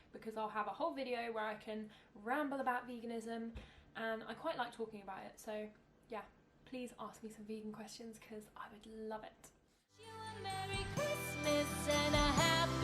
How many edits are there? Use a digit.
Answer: 1